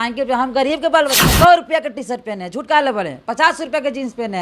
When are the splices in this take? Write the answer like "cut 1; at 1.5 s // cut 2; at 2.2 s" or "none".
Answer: cut 1; at 1.2 s